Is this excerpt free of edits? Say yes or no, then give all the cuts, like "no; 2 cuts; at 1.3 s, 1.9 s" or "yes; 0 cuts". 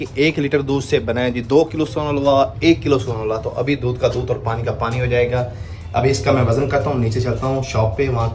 yes; 0 cuts